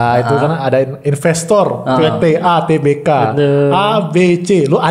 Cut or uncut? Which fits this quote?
uncut